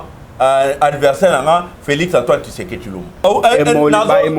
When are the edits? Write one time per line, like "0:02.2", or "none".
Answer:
0:03.2